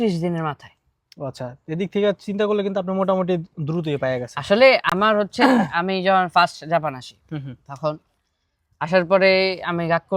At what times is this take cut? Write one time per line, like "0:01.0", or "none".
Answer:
none